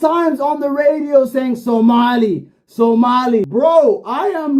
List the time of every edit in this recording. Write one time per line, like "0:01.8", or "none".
0:03.5